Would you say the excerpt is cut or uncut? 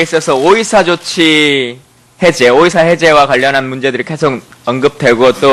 cut